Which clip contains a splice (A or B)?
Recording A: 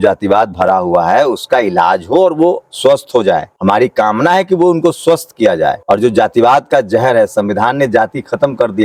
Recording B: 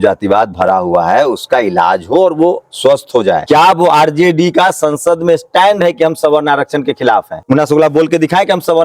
B